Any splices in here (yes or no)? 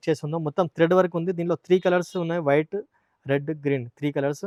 no